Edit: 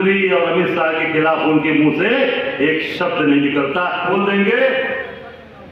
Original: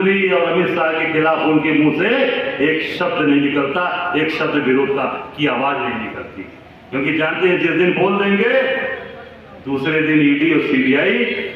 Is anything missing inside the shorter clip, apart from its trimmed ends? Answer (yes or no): yes